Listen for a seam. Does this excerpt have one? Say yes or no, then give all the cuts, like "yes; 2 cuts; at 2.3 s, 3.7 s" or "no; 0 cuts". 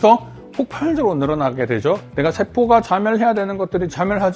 yes; 1 cut; at 2.1 s